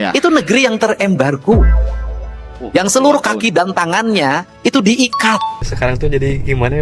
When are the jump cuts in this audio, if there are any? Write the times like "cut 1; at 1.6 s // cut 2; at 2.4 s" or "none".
cut 1; at 5.6 s